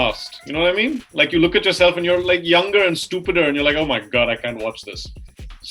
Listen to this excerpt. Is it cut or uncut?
uncut